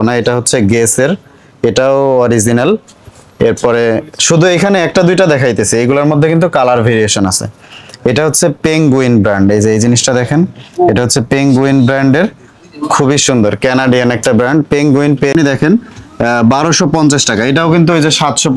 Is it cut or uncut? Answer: cut